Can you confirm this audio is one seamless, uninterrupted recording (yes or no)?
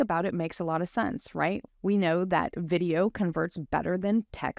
no